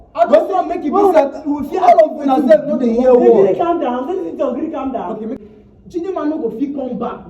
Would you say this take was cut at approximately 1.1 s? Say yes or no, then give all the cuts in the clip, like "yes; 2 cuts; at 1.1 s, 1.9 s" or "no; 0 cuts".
no; 1 cut; at 5.4 s